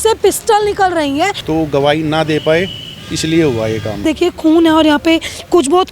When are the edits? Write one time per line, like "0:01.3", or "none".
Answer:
0:01.4
0:04.0